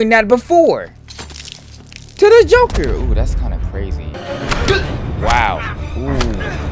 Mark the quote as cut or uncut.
cut